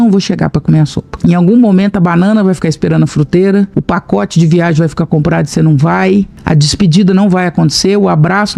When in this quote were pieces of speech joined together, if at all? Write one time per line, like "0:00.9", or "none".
0:01.0
0:03.8
0:06.4